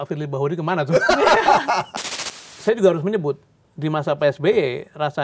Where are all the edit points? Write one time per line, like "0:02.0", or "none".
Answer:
0:01.9